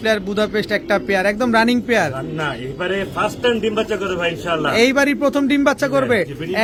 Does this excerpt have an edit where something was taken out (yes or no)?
no